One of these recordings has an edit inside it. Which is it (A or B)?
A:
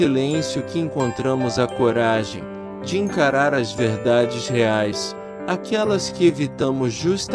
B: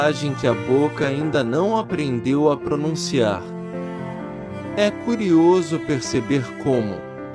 B